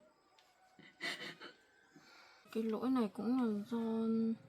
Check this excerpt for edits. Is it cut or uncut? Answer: cut